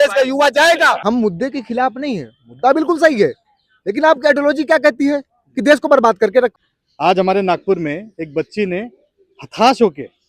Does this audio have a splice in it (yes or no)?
yes